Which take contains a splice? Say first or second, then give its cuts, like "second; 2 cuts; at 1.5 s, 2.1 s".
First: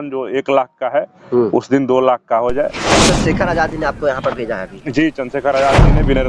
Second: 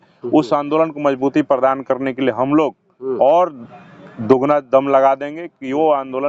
first; 1 cut; at 2.8 s